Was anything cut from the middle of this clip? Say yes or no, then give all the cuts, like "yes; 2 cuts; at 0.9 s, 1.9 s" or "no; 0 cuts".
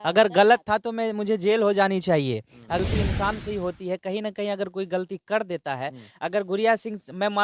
yes; 1 cut; at 2.8 s